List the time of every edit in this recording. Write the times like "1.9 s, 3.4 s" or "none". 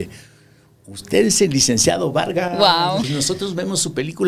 3.1 s